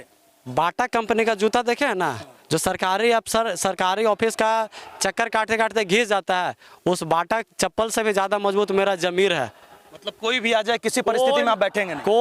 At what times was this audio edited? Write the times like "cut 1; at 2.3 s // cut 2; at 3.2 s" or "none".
none